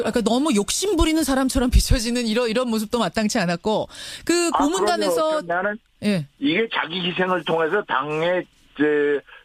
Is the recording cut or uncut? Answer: cut